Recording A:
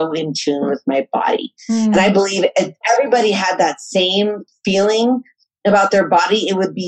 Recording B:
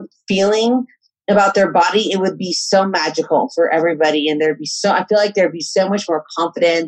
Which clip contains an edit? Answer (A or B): A